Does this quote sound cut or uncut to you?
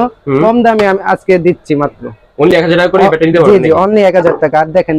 uncut